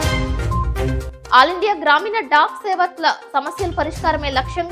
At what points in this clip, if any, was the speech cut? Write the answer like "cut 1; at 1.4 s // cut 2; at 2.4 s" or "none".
cut 1; at 1.1 s